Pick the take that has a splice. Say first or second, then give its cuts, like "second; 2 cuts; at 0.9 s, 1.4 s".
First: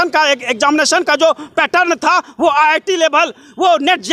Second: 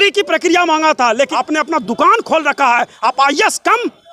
second; 1 cut; at 1.3 s